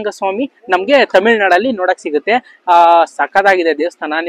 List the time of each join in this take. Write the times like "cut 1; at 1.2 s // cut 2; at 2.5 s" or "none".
none